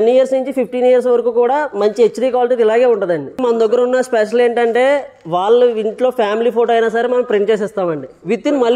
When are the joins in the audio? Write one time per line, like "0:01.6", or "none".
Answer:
0:03.4